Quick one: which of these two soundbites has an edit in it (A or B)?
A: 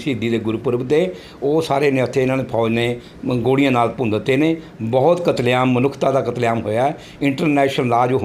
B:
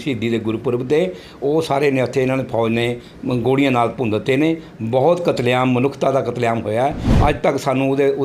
B